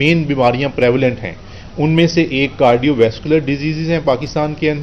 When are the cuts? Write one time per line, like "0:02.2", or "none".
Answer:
none

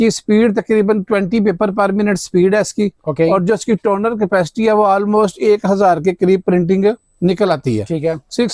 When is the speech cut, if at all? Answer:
none

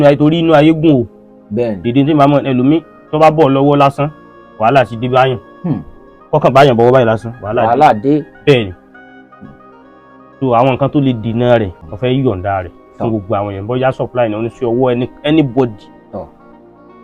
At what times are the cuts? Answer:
0:11.8

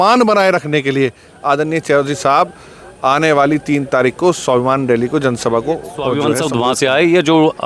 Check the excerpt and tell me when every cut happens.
0:06.2

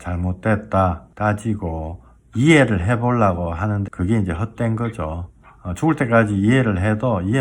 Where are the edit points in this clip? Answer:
0:01.1
0:03.9

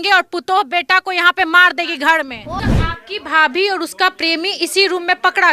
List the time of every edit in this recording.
0:02.6

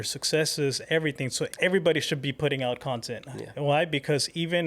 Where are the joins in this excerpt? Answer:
0:01.5

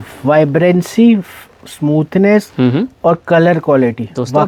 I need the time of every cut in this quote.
none

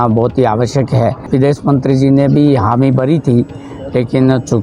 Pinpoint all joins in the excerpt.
0:01.2

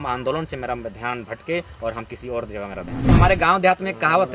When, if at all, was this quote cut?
0:03.0

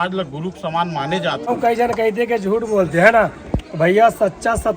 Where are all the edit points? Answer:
0:01.4

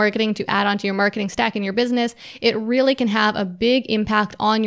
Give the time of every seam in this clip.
none

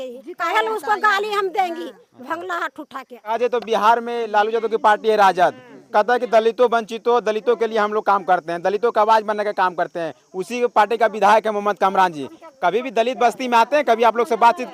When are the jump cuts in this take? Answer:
0:03.3

